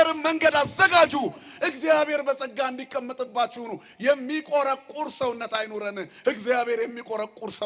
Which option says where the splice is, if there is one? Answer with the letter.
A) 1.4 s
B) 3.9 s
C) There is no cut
C